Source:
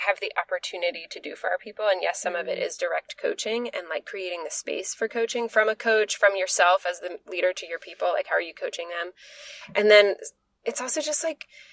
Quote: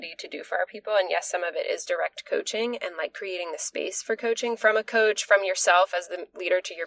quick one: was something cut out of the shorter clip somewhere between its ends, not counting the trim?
no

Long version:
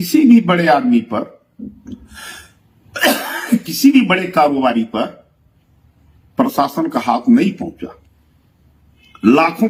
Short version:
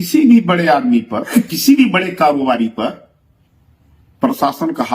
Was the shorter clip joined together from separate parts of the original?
yes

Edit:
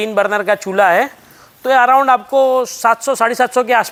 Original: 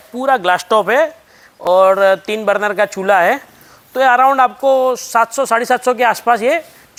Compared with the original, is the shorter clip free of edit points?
yes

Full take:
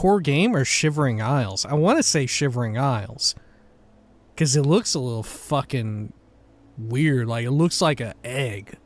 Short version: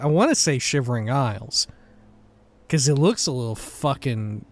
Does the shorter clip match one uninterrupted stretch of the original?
yes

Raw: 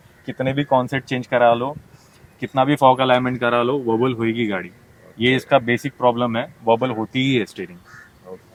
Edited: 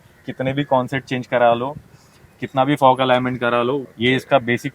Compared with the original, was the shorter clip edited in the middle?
yes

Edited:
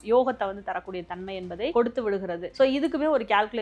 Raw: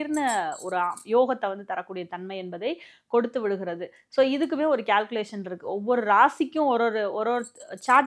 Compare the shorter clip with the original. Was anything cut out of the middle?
yes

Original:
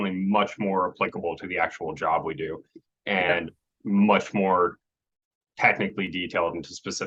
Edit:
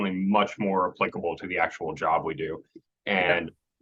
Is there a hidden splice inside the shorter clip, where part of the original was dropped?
no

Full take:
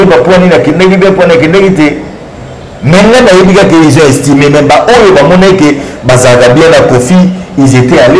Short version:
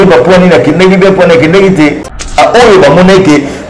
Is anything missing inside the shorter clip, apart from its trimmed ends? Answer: yes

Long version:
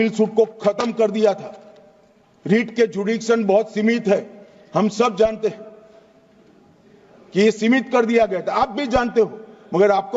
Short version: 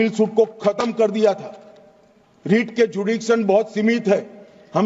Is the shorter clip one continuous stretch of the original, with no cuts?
yes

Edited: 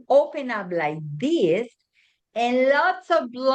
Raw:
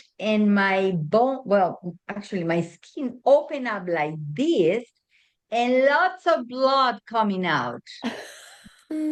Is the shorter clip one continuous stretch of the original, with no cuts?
yes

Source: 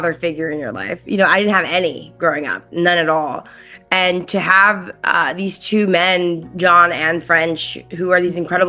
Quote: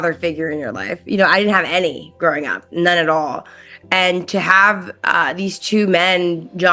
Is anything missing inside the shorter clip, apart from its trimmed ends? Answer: no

